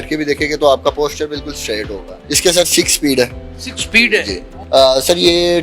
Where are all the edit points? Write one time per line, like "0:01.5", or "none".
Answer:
0:02.2
0:04.6

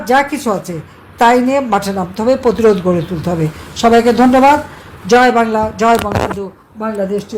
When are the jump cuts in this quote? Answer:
none

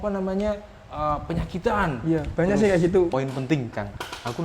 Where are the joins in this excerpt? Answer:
0:03.1

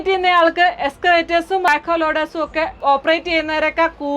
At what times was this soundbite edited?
0:01.7
0:02.8

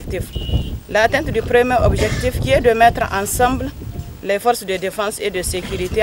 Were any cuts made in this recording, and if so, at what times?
none

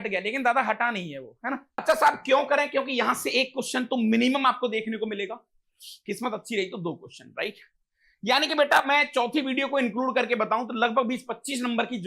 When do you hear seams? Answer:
0:01.8

